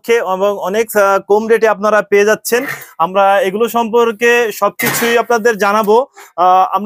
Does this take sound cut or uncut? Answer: uncut